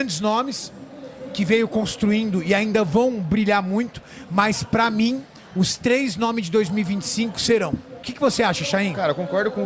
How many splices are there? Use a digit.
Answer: 1